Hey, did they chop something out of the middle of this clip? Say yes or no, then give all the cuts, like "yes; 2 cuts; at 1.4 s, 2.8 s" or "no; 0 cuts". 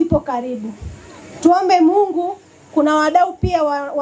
yes; 1 cut; at 1.0 s